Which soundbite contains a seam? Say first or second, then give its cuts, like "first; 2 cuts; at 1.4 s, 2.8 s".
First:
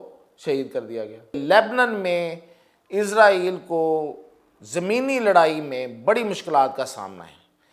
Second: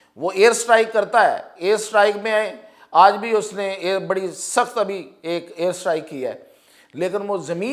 first; 1 cut; at 1.4 s